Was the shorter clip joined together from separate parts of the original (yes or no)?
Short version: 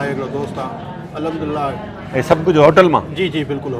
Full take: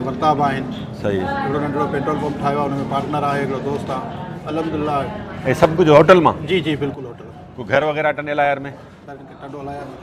no